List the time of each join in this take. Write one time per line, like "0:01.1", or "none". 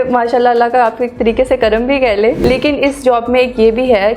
0:02.4